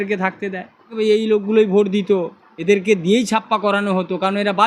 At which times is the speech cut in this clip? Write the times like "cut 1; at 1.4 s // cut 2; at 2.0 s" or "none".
cut 1; at 0.9 s